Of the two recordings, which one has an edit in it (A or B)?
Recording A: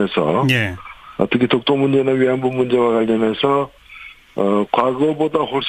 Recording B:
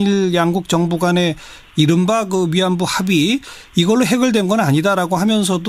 B